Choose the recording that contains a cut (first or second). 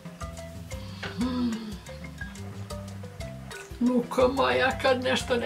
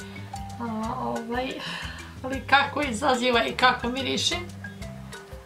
second